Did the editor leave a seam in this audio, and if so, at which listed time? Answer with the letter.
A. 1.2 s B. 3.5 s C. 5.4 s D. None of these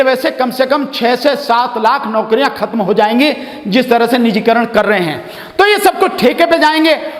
D